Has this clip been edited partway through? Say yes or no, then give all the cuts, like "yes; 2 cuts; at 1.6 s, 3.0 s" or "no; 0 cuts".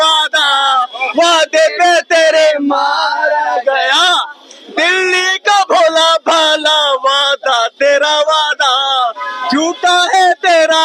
no; 0 cuts